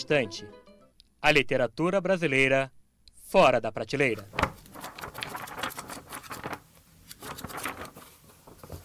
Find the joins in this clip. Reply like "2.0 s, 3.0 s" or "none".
7.9 s